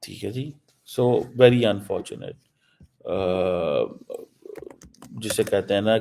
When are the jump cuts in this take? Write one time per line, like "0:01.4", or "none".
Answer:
none